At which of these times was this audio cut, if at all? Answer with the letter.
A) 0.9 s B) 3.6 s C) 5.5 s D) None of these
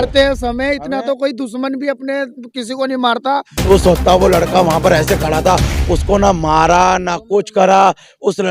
B